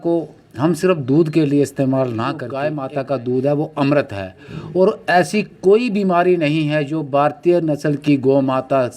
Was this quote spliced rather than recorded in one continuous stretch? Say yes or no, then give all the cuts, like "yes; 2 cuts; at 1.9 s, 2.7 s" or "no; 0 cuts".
yes; 1 cut; at 2.5 s